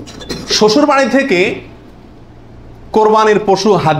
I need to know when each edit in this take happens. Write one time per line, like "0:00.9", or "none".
none